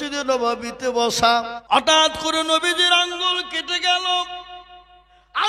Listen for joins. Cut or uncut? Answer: cut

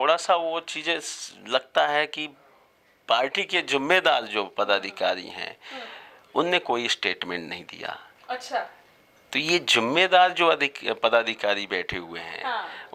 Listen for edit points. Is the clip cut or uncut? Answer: uncut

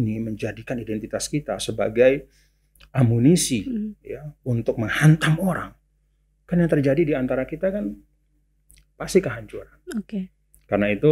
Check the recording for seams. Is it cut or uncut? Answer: uncut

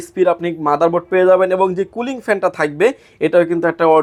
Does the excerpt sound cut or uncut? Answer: uncut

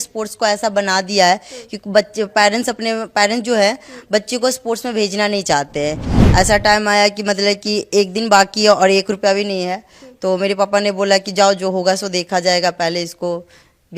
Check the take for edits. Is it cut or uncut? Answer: cut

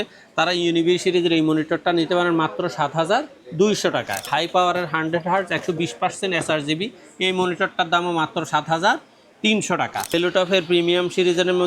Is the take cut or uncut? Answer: cut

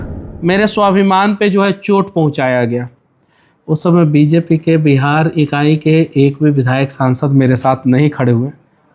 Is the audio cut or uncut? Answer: uncut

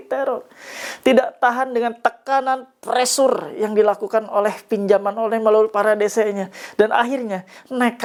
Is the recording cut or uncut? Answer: uncut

